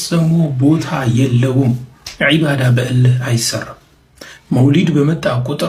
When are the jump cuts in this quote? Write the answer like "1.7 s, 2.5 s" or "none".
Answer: none

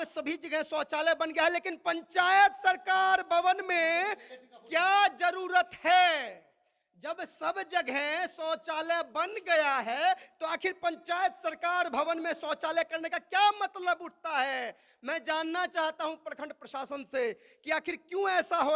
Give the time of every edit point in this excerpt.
none

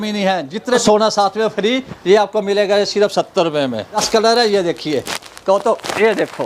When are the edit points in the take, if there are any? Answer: 0.8 s, 4.0 s

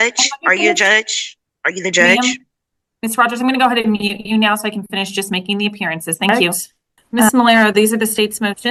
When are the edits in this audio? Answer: none

